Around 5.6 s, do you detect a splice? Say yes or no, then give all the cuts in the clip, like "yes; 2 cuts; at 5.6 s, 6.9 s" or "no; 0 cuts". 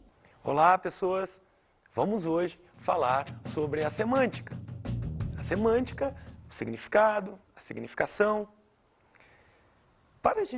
yes; 1 cut; at 5.6 s